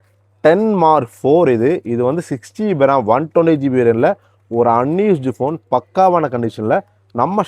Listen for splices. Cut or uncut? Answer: uncut